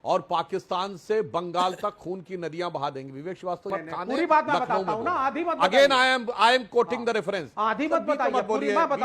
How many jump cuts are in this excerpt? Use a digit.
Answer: 2